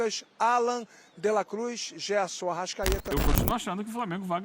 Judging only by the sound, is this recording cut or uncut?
cut